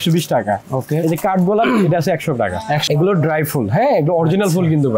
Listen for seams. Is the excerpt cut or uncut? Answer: cut